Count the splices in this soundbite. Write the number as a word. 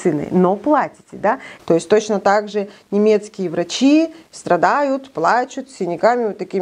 one